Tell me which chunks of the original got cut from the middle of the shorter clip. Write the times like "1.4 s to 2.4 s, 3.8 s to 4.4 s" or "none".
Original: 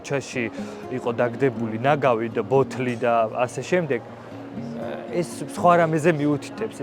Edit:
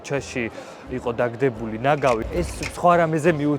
2.3 s to 5.1 s